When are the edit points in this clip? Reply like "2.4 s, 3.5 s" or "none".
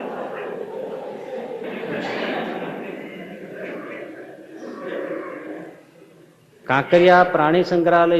none